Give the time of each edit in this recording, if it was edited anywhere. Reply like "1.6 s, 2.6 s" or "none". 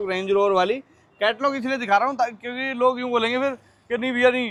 none

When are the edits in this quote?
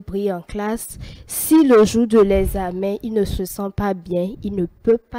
none

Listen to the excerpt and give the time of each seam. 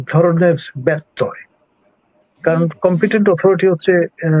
none

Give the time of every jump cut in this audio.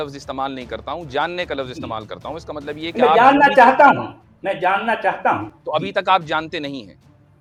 none

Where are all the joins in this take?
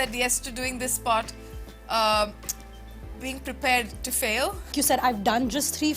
4.7 s

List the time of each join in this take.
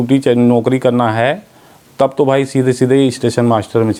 none

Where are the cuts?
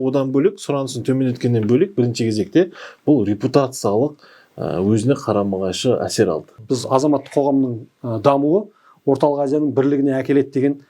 6.5 s

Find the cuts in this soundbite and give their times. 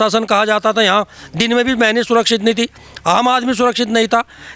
none

